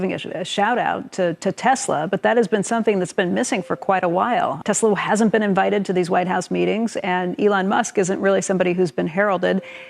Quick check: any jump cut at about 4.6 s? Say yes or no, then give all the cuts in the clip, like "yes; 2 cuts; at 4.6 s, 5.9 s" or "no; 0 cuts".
yes; 1 cut; at 4.6 s